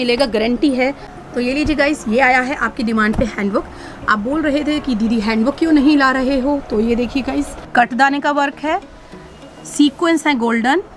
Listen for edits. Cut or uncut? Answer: cut